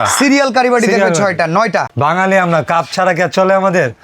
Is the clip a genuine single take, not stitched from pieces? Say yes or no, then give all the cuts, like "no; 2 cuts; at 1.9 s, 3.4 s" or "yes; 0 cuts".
no; 1 cut; at 1.9 s